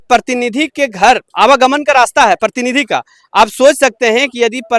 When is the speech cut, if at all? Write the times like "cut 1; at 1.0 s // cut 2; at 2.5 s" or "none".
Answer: none